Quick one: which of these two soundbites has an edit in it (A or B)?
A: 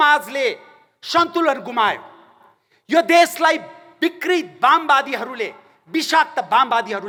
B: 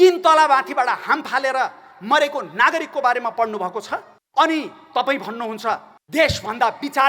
B